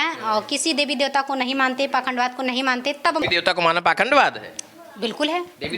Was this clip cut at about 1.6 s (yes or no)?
no